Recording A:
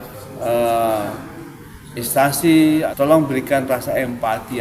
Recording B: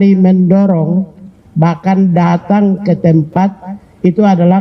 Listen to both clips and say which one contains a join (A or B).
A